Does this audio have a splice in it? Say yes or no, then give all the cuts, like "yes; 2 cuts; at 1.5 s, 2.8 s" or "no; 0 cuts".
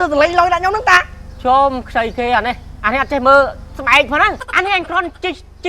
yes; 1 cut; at 4.5 s